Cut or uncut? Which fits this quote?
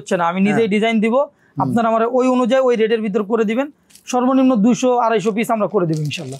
uncut